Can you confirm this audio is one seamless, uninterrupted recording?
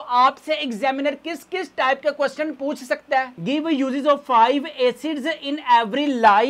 no; 1 cut; at 3.4 s

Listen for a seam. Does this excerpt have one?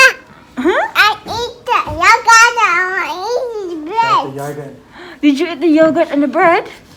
no; 0 cuts

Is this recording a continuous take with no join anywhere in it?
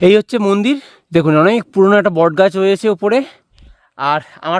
no; 1 cut; at 0.9 s

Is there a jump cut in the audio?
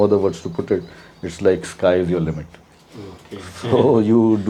no; 0 cuts

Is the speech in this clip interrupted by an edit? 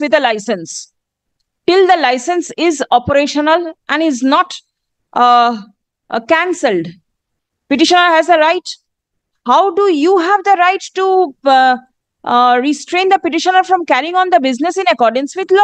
no; 0 cuts

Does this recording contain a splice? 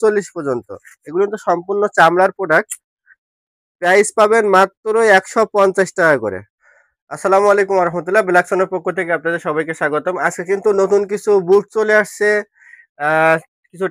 no; 0 cuts

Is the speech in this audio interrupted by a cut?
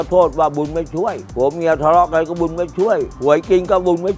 yes; 2 cuts; at 1.2 s, 3.1 s

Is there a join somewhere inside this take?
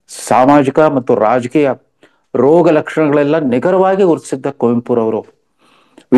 no; 0 cuts

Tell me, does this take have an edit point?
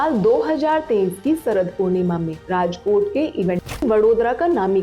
yes; 1 cut; at 3.8 s

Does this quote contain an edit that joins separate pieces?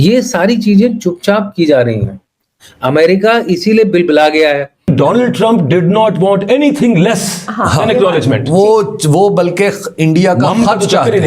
yes; 1 cut; at 4.9 s

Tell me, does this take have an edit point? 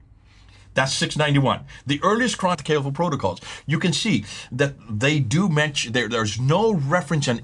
yes; 1 cut; at 2.6 s

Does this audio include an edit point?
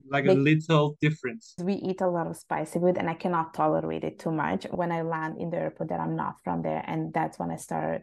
yes; 2 cuts; at 1.6 s, 4.7 s

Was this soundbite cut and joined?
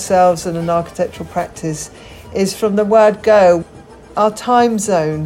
yes; 1 cut; at 4.1 s

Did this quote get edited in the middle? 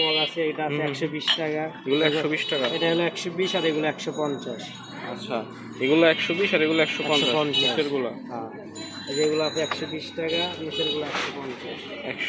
no; 0 cuts

